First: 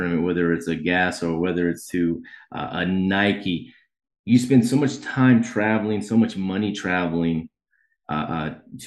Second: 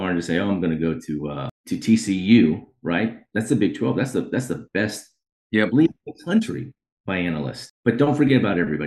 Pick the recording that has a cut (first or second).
second